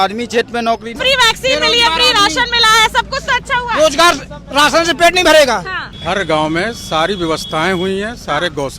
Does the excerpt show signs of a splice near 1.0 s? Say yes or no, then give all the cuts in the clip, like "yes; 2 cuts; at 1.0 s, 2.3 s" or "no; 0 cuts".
yes; 2 cuts; at 1.0 s, 5.8 s